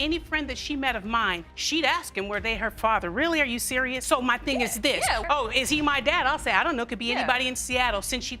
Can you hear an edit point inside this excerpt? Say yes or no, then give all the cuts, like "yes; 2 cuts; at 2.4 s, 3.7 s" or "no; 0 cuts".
no; 0 cuts